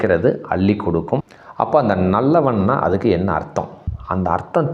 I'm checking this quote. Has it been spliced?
yes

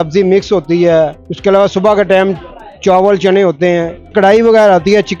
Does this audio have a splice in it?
yes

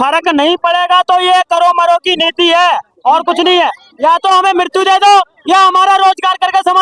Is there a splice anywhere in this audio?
no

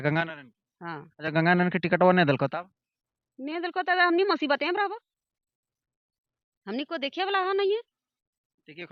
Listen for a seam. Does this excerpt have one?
no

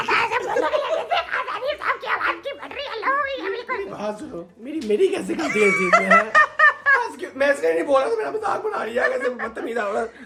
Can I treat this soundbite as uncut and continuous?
yes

